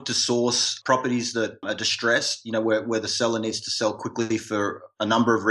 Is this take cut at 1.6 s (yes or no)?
yes